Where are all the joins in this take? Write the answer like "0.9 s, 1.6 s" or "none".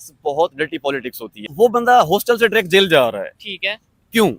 1.5 s